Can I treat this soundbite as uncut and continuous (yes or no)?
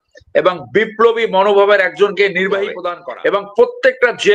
no